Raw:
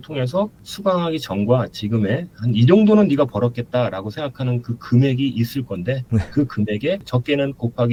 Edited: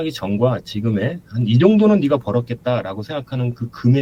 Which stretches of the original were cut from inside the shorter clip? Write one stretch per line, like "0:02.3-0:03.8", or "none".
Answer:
none